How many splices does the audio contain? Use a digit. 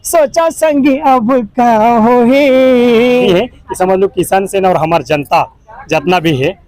1